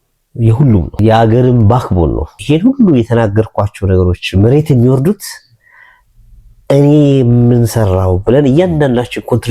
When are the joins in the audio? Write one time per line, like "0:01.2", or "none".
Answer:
0:01.0
0:02.4